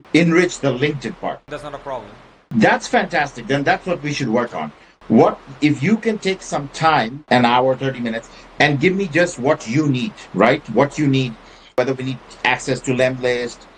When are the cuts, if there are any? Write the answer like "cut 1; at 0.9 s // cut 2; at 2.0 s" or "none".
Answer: cut 1; at 7.2 s